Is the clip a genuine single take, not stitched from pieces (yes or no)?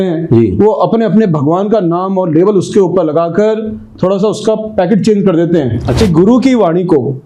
no